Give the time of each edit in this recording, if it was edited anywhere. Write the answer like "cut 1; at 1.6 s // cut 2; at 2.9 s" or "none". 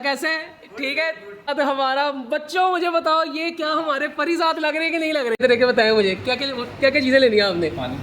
cut 1; at 1.5 s // cut 2; at 5.4 s